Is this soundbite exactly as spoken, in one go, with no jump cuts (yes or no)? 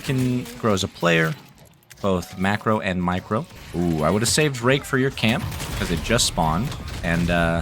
no